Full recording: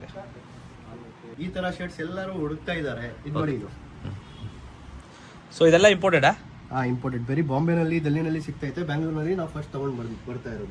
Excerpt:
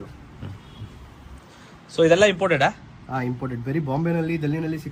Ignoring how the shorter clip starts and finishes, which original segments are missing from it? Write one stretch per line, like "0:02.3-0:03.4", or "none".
none

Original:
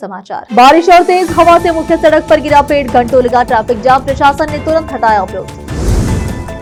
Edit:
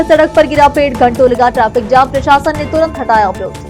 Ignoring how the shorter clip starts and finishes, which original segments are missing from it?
none

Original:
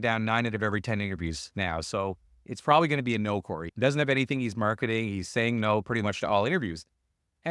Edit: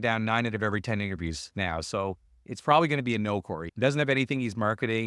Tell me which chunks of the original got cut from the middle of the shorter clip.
none

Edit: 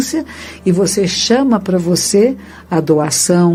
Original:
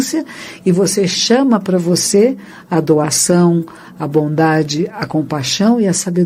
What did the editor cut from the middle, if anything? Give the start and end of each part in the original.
none

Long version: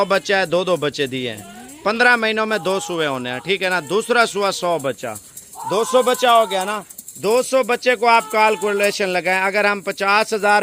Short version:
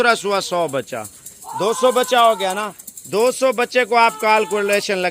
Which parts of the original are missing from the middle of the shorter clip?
none

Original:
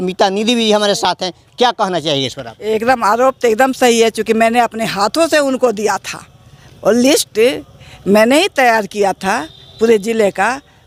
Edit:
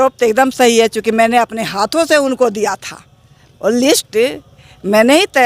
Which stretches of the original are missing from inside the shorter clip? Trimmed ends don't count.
none

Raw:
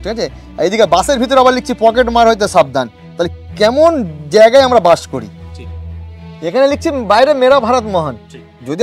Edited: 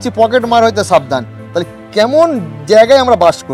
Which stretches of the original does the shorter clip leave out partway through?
none

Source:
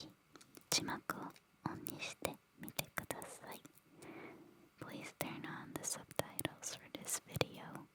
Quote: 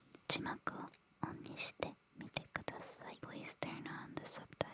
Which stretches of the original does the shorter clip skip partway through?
0:03.6-0:04.8

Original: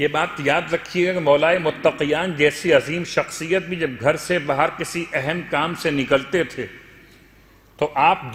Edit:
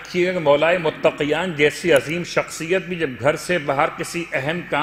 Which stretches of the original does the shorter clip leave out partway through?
none

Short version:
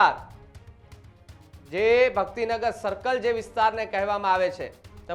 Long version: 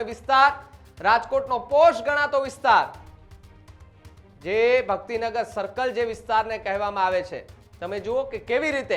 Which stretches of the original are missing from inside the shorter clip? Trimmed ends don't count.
none

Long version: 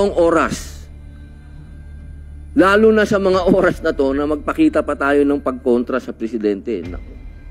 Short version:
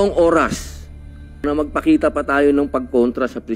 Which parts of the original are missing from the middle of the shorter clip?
0:01.4-0:04.2

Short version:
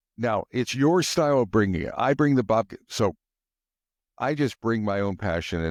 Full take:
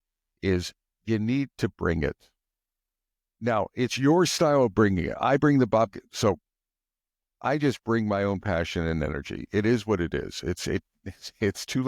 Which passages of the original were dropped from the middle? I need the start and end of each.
none

